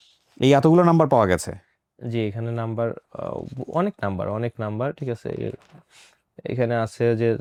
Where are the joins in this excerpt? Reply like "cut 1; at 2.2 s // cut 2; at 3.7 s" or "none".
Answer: none